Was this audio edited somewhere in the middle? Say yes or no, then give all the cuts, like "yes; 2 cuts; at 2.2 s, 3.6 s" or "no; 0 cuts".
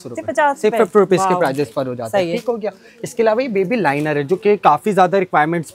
no; 0 cuts